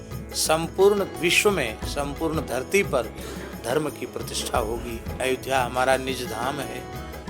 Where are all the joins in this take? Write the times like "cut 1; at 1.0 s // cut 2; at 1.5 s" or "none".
none